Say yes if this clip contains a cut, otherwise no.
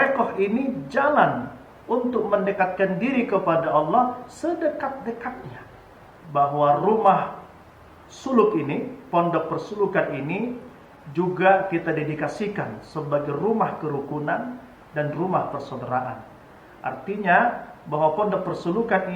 yes